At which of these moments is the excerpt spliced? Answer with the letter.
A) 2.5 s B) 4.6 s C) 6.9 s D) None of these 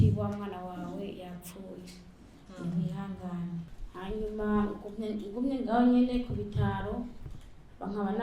D